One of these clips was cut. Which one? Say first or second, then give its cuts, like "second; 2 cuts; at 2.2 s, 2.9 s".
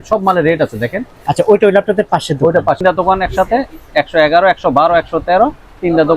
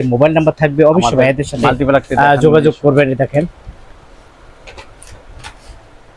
first; 1 cut; at 2.8 s